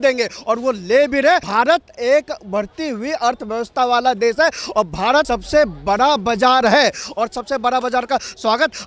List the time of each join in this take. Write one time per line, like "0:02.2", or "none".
0:01.5
0:05.3

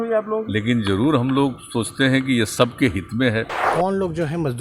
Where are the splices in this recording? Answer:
0:03.6

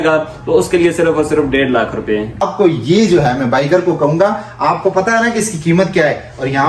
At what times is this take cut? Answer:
0:02.4

